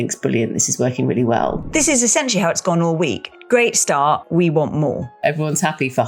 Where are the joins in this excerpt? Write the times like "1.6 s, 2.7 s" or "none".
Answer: 1.6 s, 3.3 s, 4.3 s, 5.2 s